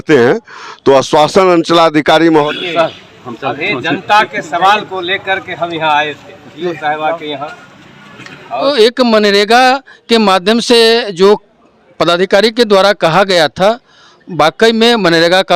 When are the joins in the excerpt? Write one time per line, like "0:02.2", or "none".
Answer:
0:02.5
0:08.6